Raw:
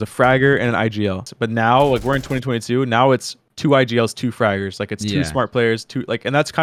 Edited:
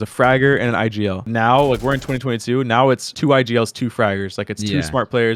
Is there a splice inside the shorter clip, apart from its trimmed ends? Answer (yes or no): yes